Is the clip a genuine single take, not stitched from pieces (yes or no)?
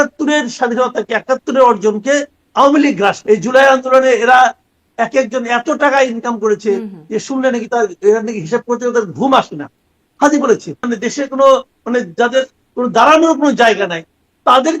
no